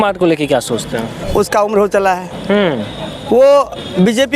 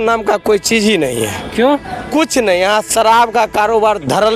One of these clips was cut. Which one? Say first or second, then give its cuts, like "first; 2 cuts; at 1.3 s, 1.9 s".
first; 1 cut; at 1.2 s